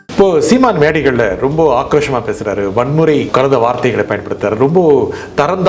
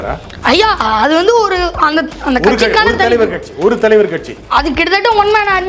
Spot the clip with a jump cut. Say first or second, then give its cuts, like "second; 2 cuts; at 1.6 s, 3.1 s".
first; 1 cut; at 3.3 s